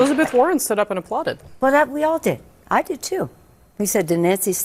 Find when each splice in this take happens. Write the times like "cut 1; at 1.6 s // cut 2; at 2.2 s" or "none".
cut 1; at 1.4 s